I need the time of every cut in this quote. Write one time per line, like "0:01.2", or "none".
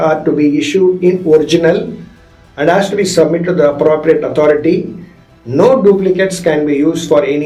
none